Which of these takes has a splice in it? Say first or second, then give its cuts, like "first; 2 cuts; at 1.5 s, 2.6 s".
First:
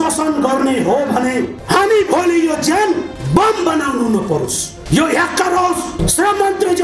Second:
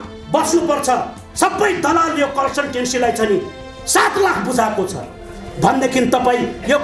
first; 4 cuts; at 1.6 s, 3.2 s, 4.7 s, 6.0 s